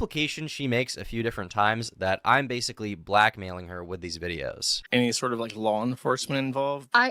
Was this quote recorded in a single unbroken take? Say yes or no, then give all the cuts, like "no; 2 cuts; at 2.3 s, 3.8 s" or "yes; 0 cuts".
no; 1 cut; at 4.8 s